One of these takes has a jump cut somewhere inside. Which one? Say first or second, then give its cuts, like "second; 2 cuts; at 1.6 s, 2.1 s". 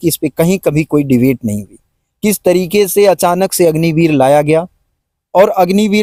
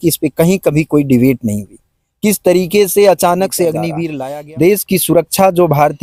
second; 1 cut; at 4.0 s